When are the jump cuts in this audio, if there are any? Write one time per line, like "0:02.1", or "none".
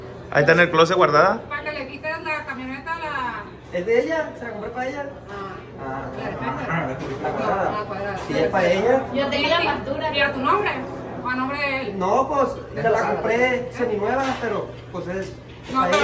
none